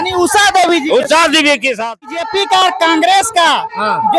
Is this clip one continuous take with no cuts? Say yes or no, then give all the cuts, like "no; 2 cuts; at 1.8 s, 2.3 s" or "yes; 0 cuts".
no; 1 cut; at 2.2 s